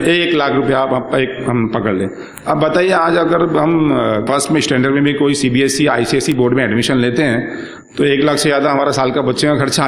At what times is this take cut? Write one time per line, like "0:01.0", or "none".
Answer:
0:04.2